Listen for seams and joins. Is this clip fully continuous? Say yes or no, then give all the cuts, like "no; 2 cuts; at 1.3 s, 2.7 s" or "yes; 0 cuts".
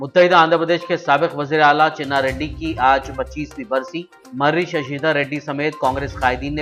yes; 0 cuts